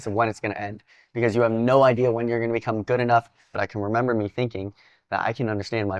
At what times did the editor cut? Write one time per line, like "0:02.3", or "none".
0:03.4